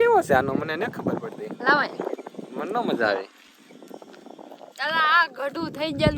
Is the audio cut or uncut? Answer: uncut